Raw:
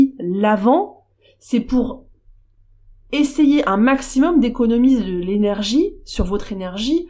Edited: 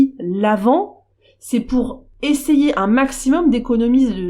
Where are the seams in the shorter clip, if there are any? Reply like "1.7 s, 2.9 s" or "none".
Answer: 2.0 s